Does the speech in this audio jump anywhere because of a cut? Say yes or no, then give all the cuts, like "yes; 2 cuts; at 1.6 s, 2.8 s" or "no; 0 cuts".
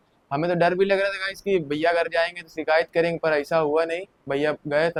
no; 0 cuts